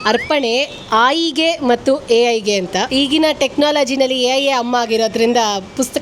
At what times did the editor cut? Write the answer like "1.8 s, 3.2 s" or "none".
2.9 s